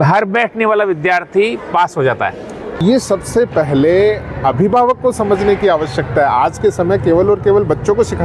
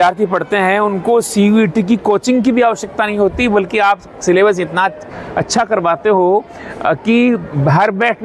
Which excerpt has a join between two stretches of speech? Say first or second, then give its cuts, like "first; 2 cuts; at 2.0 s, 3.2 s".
first; 1 cut; at 2.8 s